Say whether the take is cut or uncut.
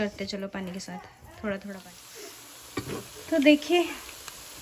cut